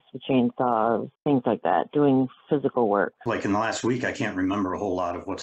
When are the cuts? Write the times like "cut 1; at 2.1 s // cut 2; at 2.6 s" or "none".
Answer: cut 1; at 3.2 s